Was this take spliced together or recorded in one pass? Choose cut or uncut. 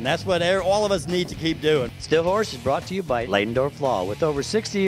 cut